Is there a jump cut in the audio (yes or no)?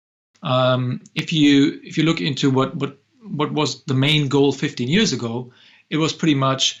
no